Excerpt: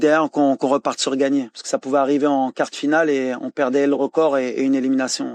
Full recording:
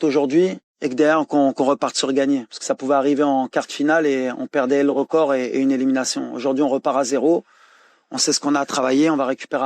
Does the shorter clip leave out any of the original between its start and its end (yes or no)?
no